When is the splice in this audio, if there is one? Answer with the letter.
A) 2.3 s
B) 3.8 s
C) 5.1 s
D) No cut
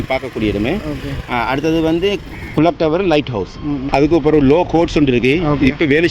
B